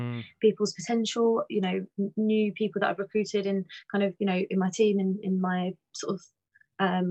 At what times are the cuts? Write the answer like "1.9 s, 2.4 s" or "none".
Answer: none